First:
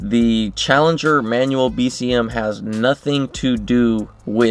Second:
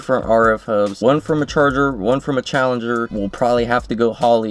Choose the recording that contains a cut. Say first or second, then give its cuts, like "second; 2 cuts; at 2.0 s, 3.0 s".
second; 2 cuts; at 0.9 s, 3.1 s